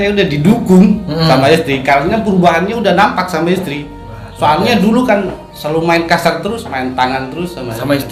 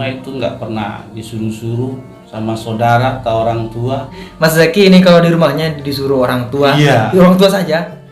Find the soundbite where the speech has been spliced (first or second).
second